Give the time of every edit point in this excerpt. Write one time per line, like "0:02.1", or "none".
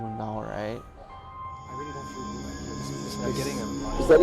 0:01.0